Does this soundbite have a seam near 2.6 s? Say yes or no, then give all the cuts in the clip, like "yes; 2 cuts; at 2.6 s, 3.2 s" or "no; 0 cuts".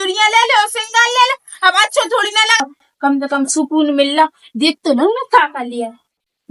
yes; 1 cut; at 2.6 s